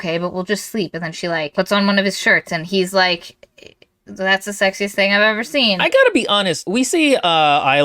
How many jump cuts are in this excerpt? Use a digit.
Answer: 3